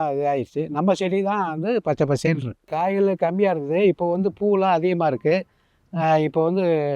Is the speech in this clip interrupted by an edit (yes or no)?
yes